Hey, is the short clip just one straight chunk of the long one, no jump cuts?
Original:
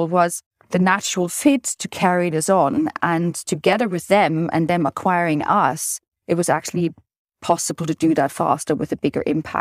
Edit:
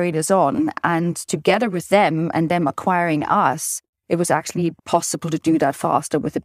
no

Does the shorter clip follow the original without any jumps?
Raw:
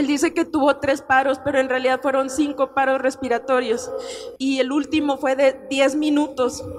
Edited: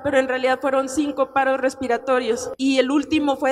no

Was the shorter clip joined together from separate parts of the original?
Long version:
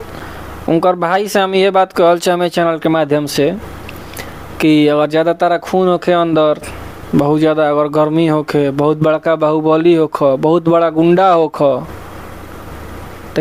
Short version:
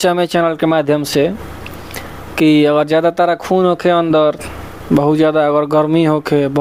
no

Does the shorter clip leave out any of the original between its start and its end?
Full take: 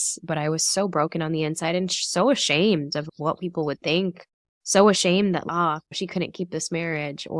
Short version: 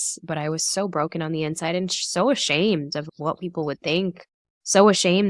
no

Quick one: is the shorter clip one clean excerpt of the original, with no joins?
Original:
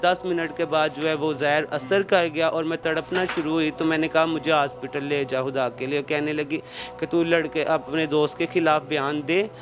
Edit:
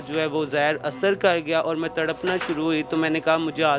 yes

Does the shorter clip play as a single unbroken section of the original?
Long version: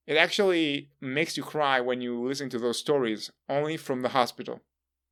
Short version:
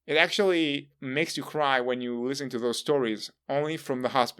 yes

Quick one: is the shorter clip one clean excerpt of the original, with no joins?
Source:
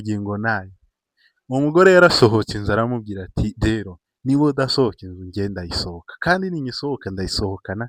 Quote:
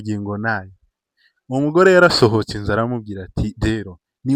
yes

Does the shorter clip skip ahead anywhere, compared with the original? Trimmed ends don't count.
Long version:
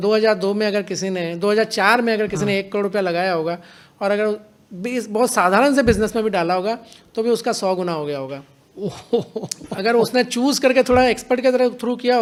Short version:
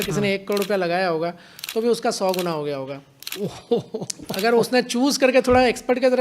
yes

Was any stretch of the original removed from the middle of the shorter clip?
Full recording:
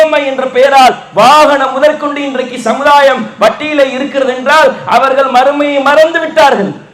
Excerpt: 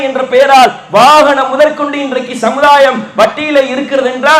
no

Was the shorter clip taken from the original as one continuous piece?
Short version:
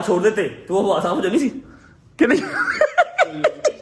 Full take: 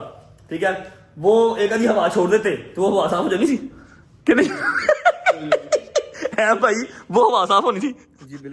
yes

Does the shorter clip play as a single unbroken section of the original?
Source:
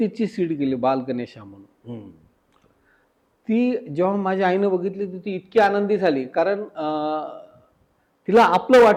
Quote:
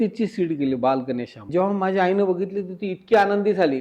no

